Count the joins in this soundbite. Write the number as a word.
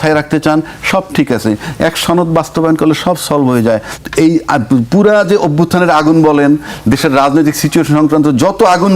one